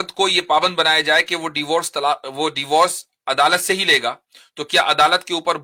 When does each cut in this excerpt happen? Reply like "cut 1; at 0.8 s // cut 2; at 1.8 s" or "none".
none